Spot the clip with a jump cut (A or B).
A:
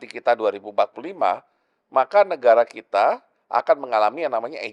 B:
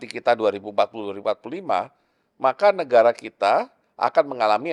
A